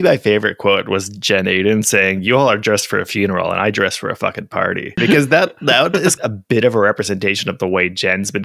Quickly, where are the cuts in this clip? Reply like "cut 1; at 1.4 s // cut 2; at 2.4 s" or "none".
cut 1; at 5.0 s // cut 2; at 6.2 s